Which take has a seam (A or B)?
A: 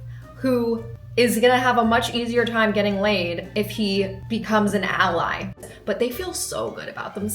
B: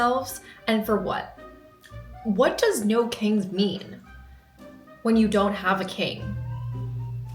A